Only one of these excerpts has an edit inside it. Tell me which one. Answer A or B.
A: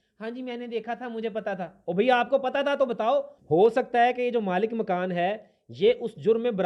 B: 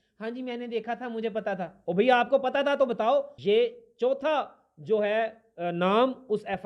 B